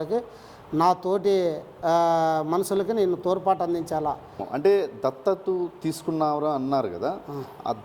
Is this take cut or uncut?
cut